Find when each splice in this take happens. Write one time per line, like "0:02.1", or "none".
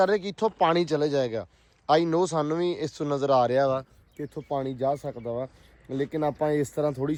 none

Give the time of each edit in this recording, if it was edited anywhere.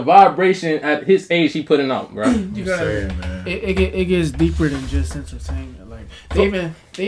none

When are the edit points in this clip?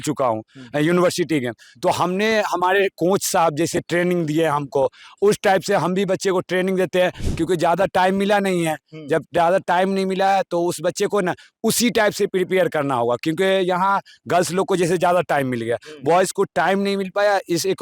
0:07.2

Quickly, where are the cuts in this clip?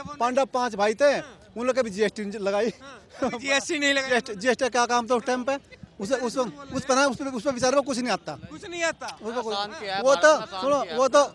0:05.8

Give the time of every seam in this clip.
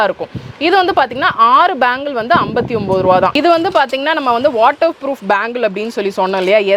0:03.3

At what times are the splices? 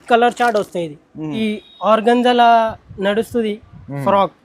0:01.4

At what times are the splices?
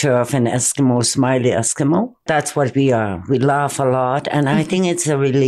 0:02.2

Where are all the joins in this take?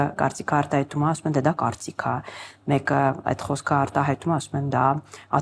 none

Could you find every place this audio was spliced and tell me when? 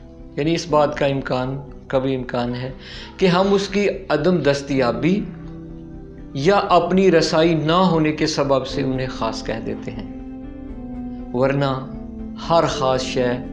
0:09.9
0:11.3

